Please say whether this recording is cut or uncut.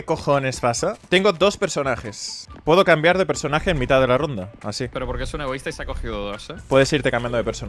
cut